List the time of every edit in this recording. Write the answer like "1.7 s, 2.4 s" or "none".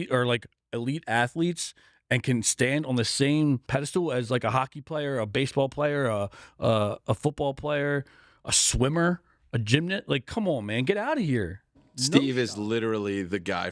3.6 s